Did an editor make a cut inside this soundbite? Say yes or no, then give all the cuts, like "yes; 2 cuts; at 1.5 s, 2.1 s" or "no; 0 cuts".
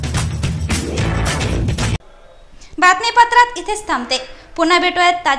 no; 0 cuts